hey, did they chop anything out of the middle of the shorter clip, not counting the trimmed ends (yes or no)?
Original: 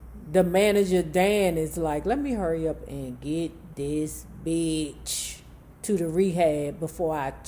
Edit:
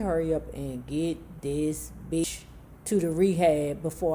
yes